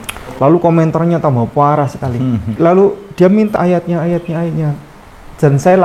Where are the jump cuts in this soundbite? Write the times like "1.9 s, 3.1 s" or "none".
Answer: 2.5 s, 3.6 s